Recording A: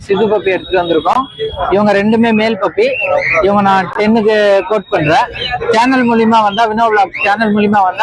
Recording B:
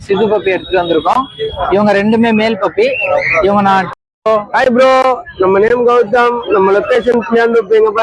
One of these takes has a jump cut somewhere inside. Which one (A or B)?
B